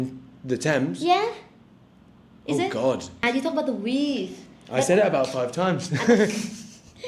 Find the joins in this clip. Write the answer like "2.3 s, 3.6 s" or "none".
3.2 s